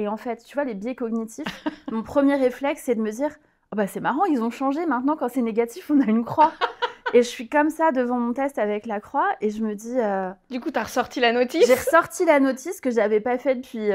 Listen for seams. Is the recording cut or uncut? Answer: uncut